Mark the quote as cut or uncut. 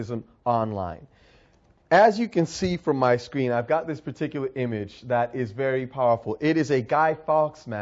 uncut